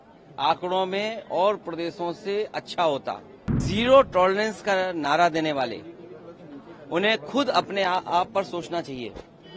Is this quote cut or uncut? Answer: cut